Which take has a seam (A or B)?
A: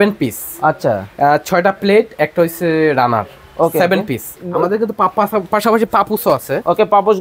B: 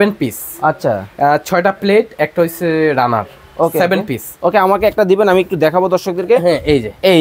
A